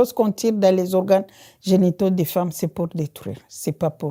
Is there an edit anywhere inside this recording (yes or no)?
no